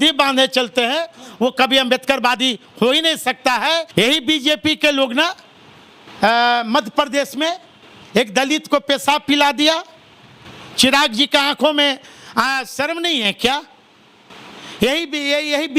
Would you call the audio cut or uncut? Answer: cut